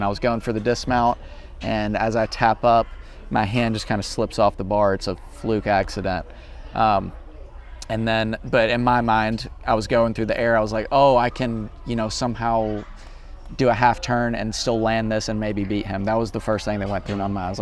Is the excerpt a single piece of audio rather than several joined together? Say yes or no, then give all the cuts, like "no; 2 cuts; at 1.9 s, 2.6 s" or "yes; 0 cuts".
yes; 0 cuts